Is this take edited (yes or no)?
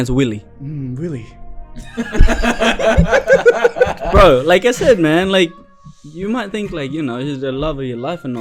no